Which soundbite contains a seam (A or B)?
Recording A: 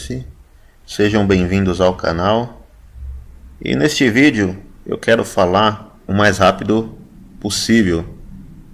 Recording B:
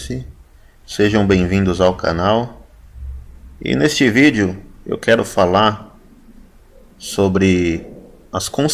B